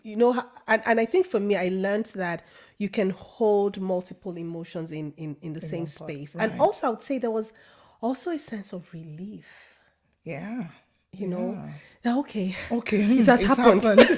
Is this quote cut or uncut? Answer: cut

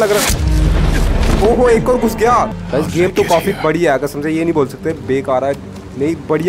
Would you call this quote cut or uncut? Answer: cut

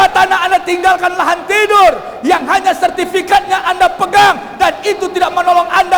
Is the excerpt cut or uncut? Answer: uncut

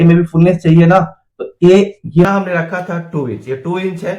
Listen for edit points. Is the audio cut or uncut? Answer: cut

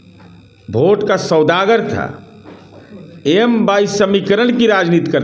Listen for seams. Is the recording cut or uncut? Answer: uncut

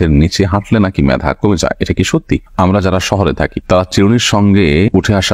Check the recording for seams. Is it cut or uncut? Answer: cut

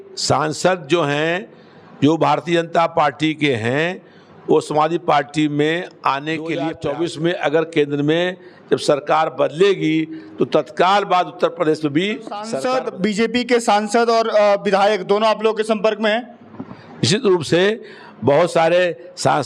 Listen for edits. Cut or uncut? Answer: cut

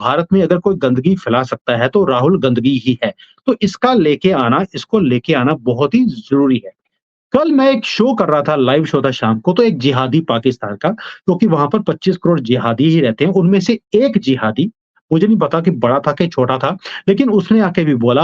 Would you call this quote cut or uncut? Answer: uncut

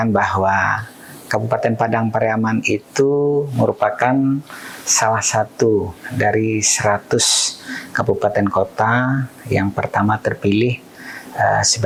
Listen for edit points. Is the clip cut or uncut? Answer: uncut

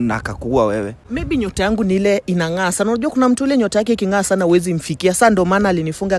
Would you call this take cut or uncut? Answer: cut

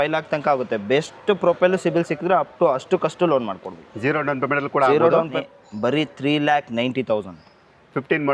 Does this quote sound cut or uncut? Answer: cut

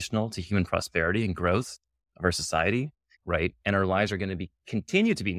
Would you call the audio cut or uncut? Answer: cut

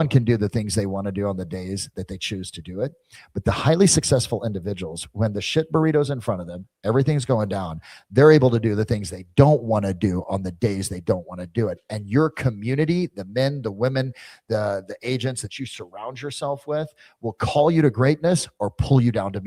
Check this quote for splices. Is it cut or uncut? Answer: uncut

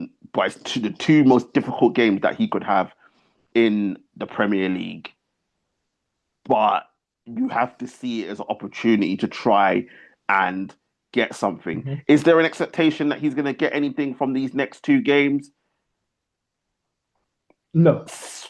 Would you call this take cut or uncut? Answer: uncut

